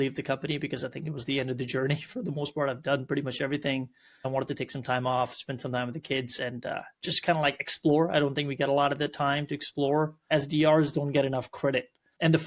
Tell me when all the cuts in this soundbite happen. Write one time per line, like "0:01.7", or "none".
0:10.3